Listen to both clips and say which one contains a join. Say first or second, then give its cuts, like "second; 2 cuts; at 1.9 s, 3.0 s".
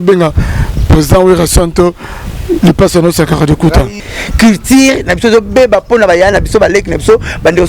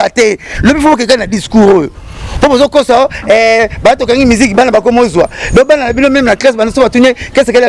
first; 1 cut; at 4.1 s